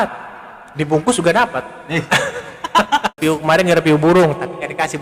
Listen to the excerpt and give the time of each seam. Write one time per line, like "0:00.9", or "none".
0:03.2